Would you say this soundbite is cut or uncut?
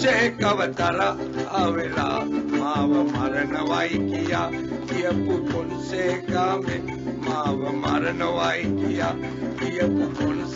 uncut